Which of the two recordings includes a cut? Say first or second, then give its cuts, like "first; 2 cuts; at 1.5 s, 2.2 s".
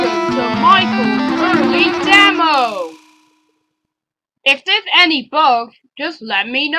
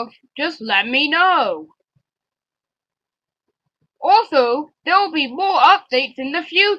first; 1 cut; at 1.0 s